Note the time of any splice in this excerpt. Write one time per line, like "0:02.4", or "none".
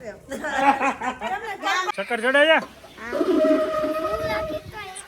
0:01.9